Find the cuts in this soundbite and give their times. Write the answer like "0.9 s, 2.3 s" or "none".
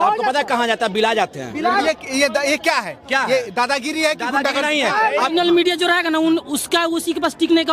1.8 s, 5.3 s